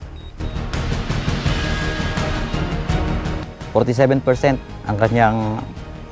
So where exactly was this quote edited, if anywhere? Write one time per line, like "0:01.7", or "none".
0:03.4